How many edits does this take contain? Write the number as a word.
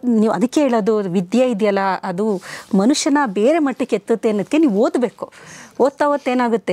zero